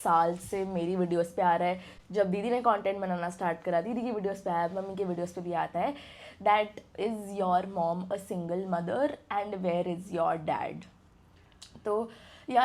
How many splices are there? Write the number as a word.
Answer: zero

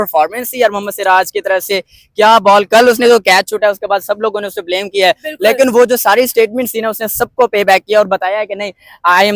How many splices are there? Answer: zero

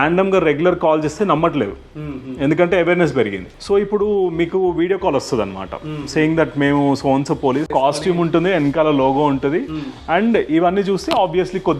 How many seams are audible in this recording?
two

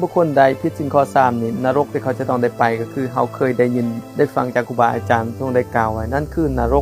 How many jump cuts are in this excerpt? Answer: zero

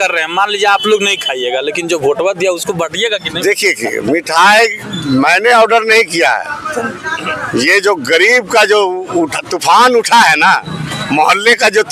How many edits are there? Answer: zero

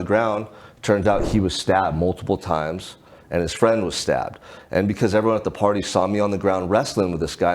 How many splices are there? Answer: zero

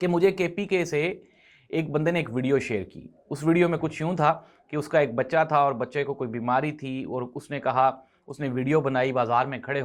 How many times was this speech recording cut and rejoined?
zero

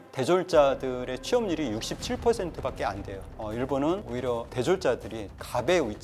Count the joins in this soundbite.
one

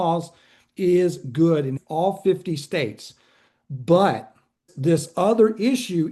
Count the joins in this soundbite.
two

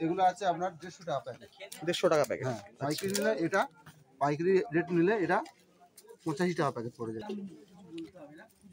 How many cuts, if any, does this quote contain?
one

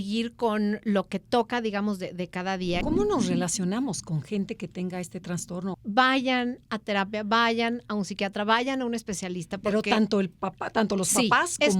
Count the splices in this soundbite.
two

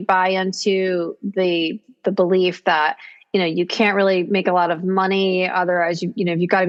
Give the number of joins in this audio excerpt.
zero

